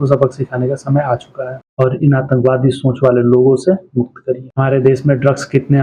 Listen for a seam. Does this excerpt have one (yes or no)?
yes